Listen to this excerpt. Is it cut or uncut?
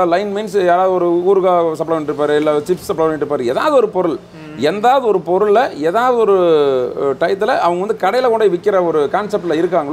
uncut